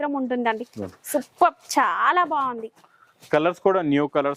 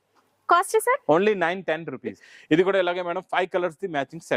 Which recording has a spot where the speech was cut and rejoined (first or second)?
second